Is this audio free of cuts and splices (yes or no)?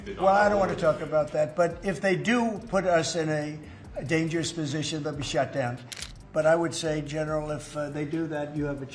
no